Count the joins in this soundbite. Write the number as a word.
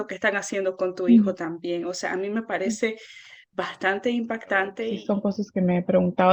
one